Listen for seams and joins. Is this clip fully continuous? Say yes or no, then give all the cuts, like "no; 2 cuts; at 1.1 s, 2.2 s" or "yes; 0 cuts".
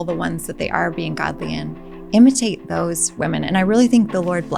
yes; 0 cuts